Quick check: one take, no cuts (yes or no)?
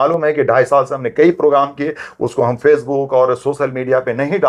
yes